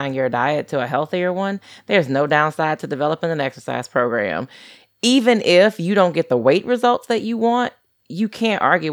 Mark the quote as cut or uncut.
uncut